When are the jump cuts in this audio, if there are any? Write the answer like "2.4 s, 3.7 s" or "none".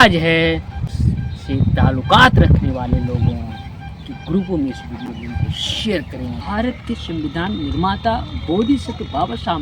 0.9 s, 6.4 s